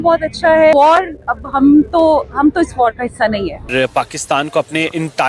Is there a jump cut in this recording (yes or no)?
yes